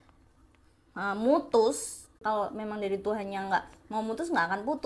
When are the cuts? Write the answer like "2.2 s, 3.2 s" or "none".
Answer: 2.1 s